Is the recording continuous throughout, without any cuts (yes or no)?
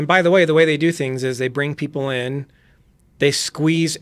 yes